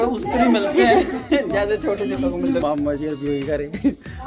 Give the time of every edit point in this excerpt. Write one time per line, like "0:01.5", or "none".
0:02.6